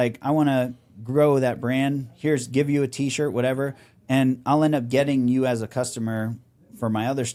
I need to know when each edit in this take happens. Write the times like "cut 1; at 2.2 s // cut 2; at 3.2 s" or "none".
none